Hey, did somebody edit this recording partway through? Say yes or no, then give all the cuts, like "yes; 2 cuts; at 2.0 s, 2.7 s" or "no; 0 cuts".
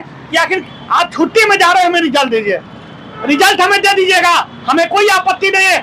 no; 0 cuts